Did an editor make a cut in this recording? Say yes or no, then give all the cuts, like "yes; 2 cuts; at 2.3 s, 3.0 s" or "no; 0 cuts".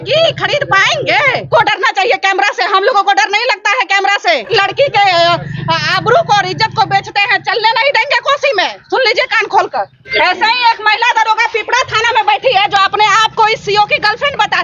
yes; 3 cuts; at 1.4 s, 4.5 s, 10.1 s